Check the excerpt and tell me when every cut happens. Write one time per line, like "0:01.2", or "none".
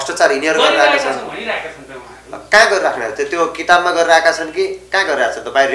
none